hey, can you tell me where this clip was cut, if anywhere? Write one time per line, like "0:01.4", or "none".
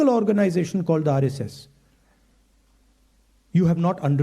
0:01.1